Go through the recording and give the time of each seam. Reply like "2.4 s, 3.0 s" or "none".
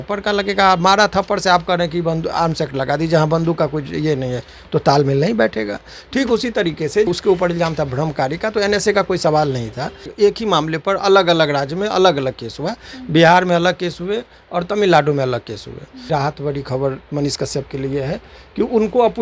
7.1 s, 10.1 s, 16.1 s